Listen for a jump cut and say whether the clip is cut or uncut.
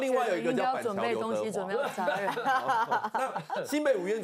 uncut